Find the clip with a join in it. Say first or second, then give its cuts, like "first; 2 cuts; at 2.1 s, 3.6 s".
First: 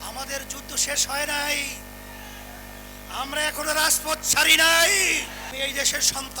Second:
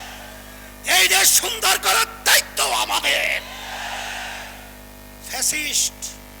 first; 1 cut; at 5.5 s